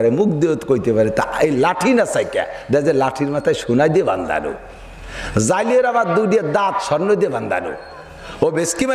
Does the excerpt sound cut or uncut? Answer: uncut